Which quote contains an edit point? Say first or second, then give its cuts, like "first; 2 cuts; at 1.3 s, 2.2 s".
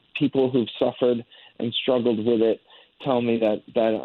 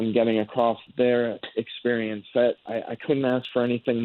second; 2 cuts; at 0.8 s, 2.6 s